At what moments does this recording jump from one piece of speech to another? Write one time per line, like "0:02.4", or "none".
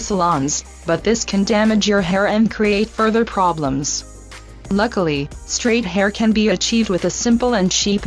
0:03.7